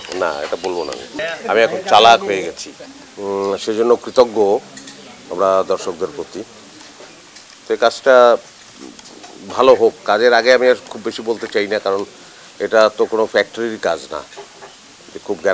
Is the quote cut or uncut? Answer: cut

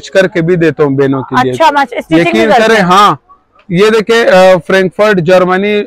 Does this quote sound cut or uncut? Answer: uncut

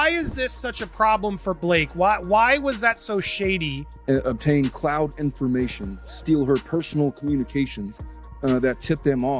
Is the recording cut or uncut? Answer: cut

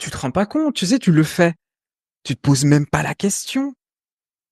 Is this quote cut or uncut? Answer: uncut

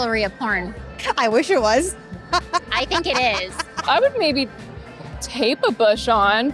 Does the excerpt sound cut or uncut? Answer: cut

